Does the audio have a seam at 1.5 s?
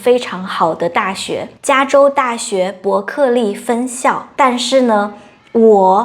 yes; 2 cuts; at 1.5 s, 4.2 s

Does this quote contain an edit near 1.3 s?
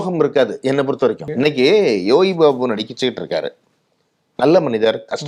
yes; 1 cut; at 1.3 s

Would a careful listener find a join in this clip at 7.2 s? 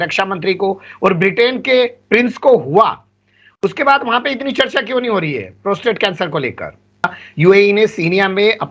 yes; 1 cut; at 7.2 s

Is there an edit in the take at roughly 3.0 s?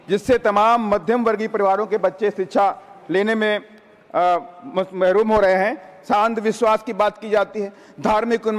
no; 1 cut; at 6.1 s

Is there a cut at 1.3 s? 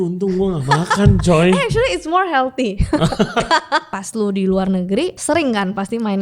no; 2 cuts; at 4.0 s, 5.2 s

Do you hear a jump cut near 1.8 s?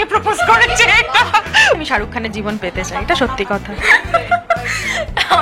yes; 2 cuts; at 1.8 s, 3.7 s

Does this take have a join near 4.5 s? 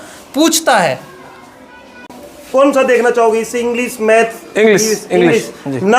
no; 1 cut; at 2.1 s

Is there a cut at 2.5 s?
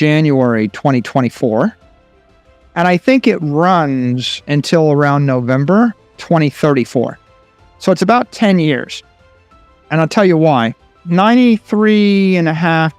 no; 1 cut; at 11.0 s

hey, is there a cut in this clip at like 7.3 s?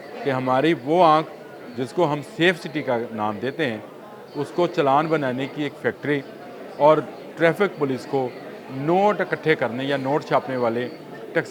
no; 0 cuts

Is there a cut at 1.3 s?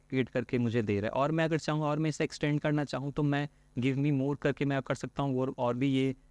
no; 0 cuts

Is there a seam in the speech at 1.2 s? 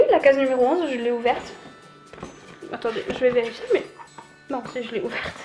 no; 0 cuts

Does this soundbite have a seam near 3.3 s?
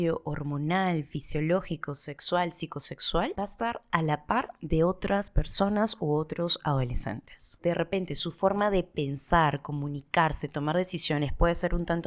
yes; 2 cuts; at 3.3 s, 7.6 s

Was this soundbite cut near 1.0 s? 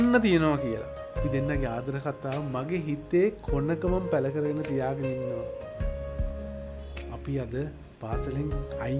yes; 1 cut; at 1.0 s

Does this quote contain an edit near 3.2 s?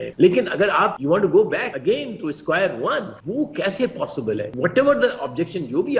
yes; 4 cuts; at 1.0 s, 1.7 s, 3.2 s, 4.5 s

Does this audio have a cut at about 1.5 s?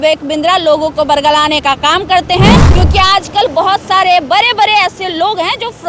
no; 1 cut; at 2.7 s

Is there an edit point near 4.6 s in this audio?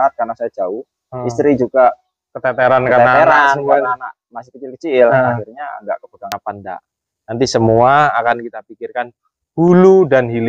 no; 1 cut; at 6.2 s

